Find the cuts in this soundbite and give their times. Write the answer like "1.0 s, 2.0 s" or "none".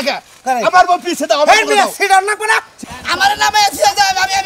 2.8 s

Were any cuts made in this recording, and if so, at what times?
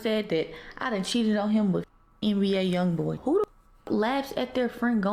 3.2 s

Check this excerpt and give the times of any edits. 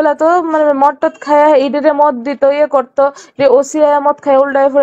none

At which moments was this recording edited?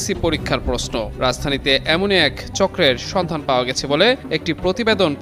none

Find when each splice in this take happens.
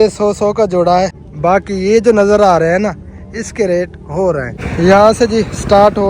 1.2 s, 4.6 s

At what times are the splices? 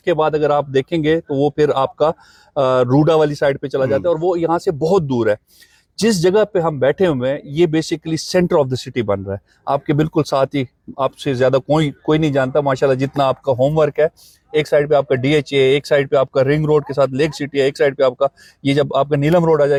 none

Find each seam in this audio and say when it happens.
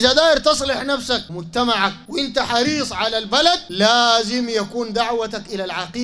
1.4 s, 2.0 s, 3.7 s

